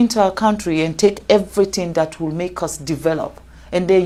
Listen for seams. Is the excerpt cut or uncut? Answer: uncut